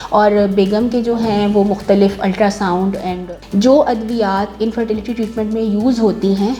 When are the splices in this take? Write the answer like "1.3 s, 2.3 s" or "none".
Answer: 3.1 s

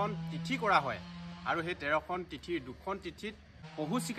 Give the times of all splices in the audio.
3.1 s

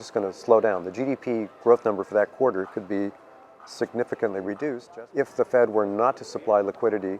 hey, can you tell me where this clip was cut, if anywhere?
4.8 s

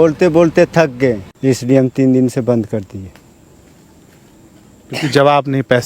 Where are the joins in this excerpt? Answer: 1.3 s

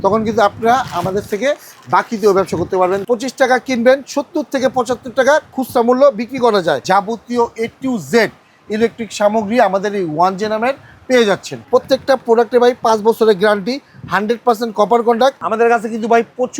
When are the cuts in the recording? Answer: 3.0 s, 6.8 s, 11.5 s, 15.4 s

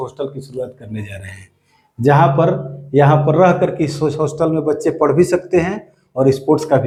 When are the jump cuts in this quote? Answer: none

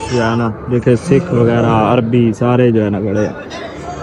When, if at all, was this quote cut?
none

